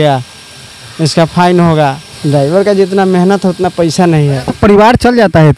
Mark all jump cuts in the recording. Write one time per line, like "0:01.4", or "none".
0:02.1